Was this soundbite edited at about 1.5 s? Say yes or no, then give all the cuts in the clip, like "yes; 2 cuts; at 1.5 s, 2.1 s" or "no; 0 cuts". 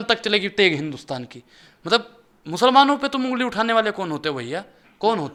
no; 0 cuts